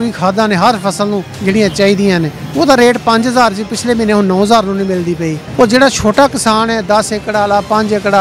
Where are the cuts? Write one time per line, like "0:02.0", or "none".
0:01.3
0:02.4
0:05.4